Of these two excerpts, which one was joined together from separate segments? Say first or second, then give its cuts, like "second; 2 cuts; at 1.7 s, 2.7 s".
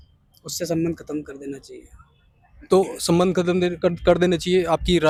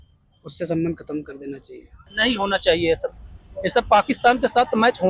second; 1 cut; at 2.1 s